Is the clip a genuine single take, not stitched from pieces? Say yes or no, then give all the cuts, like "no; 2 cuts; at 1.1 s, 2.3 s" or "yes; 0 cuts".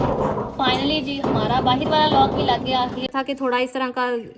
no; 1 cut; at 3.1 s